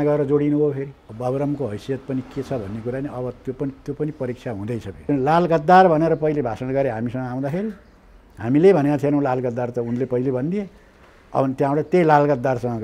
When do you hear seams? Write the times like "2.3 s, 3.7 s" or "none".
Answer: 1.0 s, 4.9 s